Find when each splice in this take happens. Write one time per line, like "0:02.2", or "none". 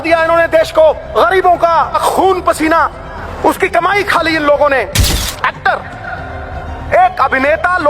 0:01.0
0:02.0
0:03.2
0:05.1